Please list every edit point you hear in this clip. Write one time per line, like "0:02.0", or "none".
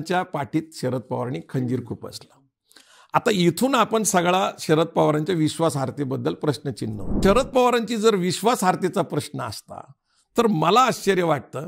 0:07.2